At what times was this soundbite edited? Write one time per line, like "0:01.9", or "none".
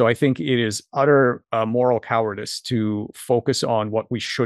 none